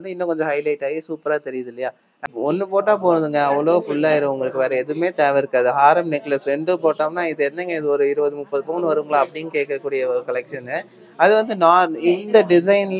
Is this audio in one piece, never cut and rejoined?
no; 1 cut; at 2.3 s

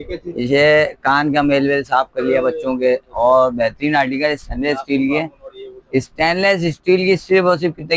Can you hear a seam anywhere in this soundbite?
no; 0 cuts

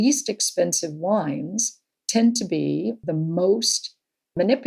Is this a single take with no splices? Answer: yes; 0 cuts

